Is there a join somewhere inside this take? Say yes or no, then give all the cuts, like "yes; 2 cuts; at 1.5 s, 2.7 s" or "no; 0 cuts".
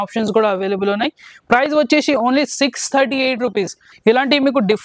yes; 1 cut; at 3.8 s